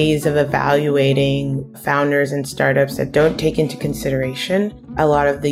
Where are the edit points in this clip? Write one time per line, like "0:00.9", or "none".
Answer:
none